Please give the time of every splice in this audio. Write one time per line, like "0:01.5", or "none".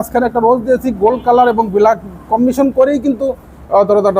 none